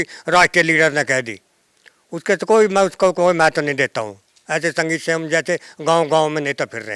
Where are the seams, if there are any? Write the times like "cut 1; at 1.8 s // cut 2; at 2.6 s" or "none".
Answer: none